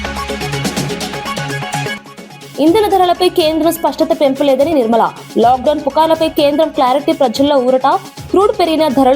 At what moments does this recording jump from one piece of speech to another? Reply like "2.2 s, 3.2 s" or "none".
1.9 s